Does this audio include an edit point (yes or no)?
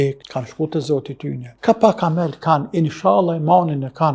no